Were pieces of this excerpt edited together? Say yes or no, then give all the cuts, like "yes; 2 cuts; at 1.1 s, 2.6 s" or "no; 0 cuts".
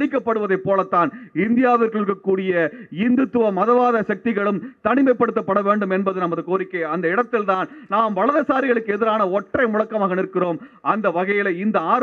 no; 0 cuts